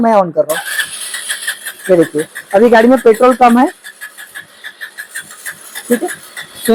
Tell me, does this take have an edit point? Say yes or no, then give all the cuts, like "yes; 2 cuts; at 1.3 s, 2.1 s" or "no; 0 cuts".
no; 0 cuts